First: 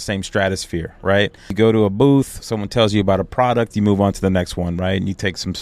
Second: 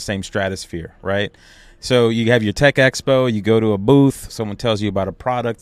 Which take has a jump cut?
first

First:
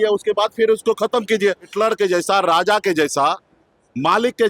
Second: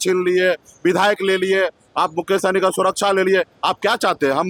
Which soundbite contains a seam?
first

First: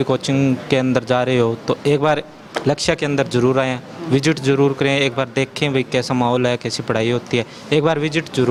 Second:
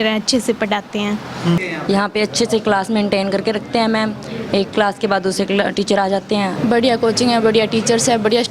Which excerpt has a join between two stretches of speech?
second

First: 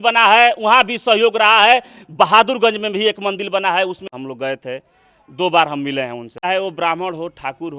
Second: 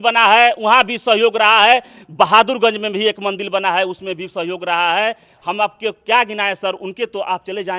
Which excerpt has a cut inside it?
first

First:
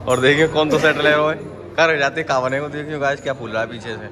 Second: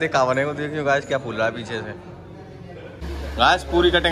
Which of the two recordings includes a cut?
second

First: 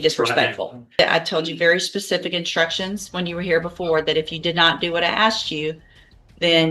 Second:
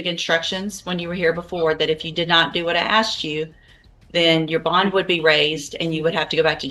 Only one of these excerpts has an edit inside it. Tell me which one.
first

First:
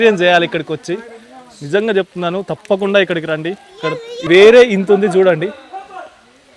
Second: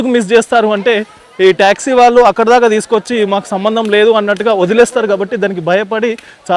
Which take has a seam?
first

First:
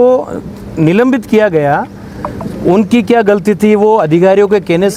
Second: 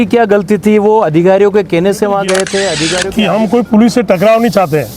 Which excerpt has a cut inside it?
second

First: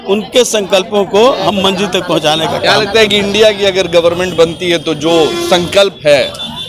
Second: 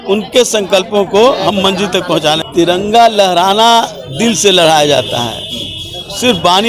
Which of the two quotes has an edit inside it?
second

